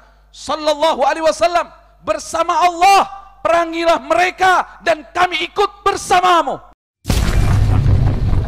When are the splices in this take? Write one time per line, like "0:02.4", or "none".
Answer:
0:06.7